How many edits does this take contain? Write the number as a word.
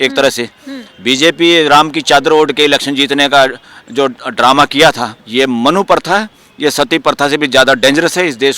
one